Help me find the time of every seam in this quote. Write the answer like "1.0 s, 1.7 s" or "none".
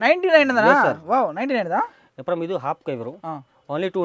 none